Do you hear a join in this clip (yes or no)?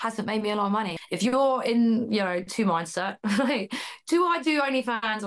yes